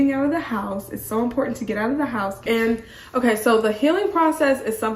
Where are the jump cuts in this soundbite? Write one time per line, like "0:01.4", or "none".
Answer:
0:02.4